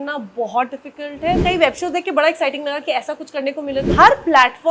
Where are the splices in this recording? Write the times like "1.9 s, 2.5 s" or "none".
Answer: 1.4 s, 3.9 s